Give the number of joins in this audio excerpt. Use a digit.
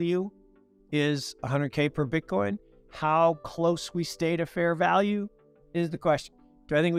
0